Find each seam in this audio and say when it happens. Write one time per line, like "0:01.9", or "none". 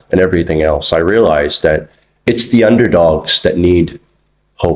none